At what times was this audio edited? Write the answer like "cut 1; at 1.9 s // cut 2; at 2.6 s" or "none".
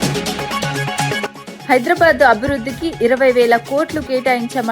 cut 1; at 1.5 s